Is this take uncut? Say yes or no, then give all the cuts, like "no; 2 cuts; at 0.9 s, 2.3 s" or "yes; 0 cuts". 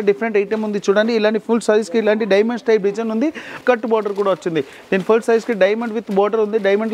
no; 1 cut; at 3.5 s